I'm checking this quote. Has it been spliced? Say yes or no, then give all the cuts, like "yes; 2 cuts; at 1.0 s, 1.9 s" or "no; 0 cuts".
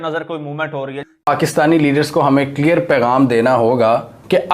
yes; 1 cut; at 1.3 s